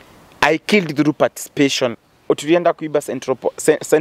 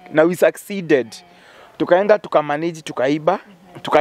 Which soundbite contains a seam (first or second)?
first